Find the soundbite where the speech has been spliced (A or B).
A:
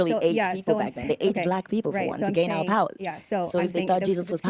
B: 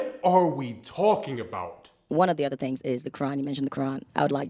B